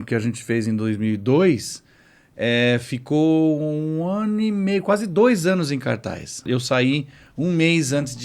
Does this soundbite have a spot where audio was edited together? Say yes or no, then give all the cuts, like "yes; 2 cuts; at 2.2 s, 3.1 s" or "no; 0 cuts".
yes; 1 cut; at 6.5 s